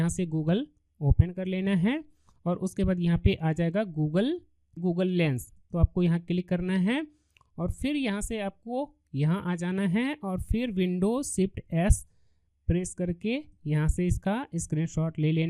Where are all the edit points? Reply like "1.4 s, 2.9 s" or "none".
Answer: 4.8 s